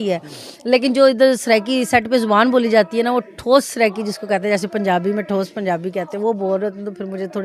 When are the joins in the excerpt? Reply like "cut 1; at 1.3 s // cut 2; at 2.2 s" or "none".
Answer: none

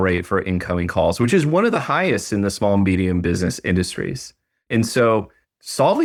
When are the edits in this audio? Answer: none

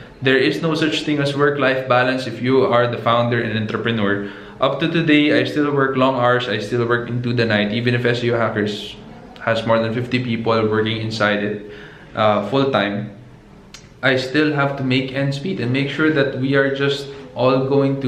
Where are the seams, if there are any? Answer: none

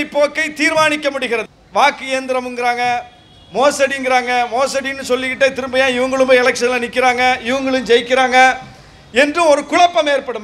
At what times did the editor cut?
cut 1; at 1.5 s

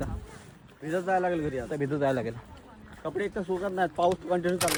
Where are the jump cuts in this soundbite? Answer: none

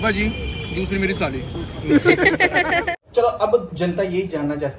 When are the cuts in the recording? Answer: cut 1; at 2.7 s

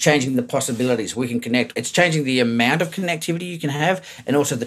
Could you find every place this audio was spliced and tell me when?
cut 1; at 1.8 s // cut 2; at 3.5 s

